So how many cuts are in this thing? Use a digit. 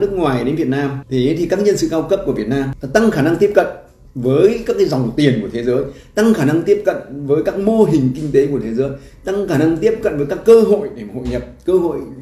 2